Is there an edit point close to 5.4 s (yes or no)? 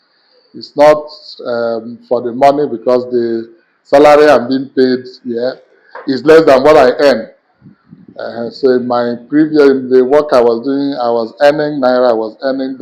no